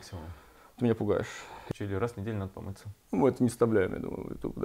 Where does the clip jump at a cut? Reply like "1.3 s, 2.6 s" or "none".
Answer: 1.6 s